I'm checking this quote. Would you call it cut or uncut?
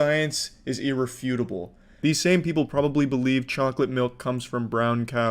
cut